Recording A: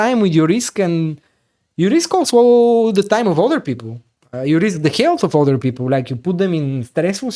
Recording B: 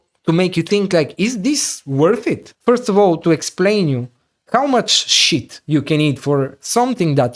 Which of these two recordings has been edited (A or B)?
B